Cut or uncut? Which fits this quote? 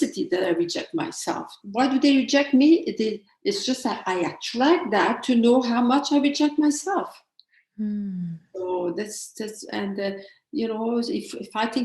cut